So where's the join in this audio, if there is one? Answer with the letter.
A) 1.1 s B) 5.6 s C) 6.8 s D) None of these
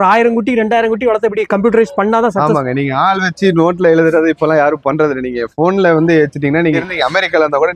C